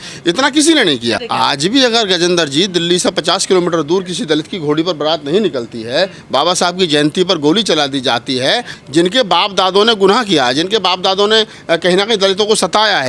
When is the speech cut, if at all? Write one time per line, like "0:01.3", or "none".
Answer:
0:01.2
0:08.7